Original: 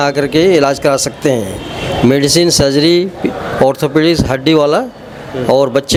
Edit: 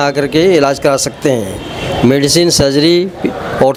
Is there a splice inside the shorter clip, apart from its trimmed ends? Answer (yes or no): no